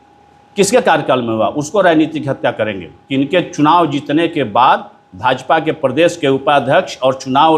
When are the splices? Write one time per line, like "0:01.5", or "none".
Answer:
none